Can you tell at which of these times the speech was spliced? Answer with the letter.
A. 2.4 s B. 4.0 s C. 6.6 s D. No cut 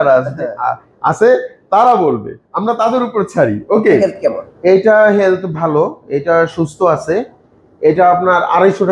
B